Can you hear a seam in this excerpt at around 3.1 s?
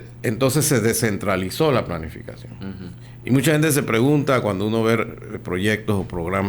yes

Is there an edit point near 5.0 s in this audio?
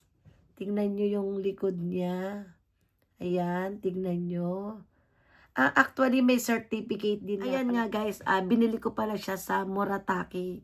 no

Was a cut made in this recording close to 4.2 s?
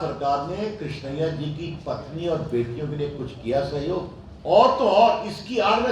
yes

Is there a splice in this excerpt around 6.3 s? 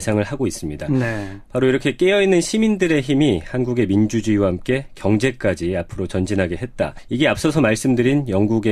no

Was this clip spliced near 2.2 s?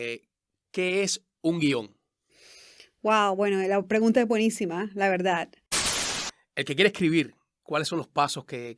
no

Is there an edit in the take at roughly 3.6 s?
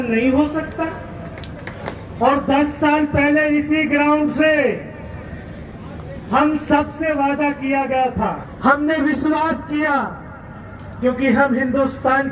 no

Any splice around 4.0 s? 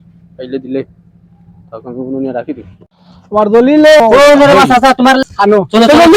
yes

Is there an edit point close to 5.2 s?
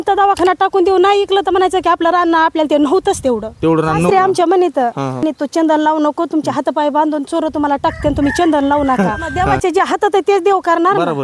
yes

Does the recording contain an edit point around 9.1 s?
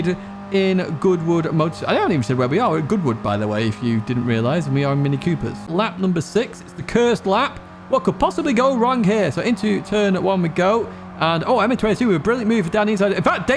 no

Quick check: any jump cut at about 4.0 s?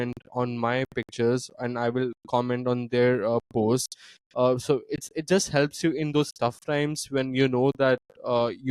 no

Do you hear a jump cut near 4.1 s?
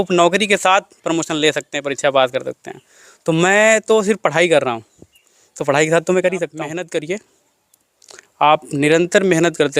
no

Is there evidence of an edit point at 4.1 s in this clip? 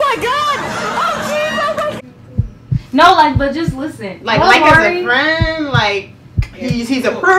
no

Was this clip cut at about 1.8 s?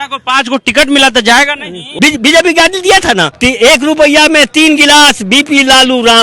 yes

